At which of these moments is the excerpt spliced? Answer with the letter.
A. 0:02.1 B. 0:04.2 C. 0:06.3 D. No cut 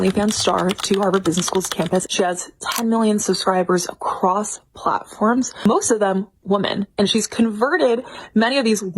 A